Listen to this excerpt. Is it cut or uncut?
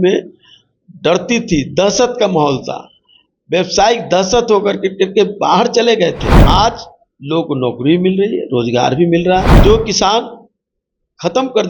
cut